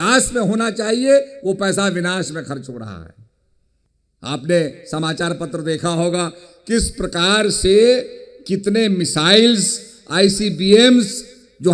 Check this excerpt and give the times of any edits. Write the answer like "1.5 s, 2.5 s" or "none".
none